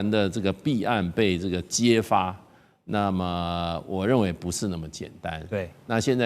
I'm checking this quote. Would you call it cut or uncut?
uncut